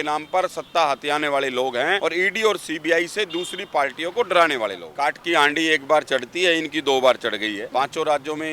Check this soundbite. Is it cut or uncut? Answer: cut